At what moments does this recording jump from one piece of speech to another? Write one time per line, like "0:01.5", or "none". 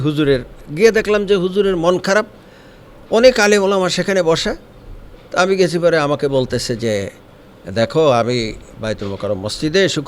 0:08.7

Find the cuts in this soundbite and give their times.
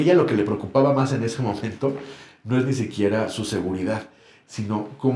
none

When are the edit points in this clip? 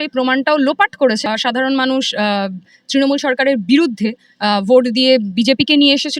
0:01.2

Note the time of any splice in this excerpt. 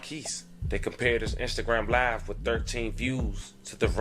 none

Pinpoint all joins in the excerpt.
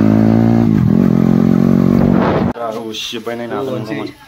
0:02.5

